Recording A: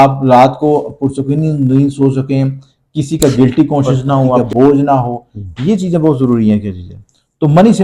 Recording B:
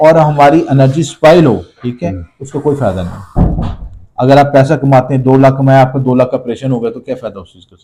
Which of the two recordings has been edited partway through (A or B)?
A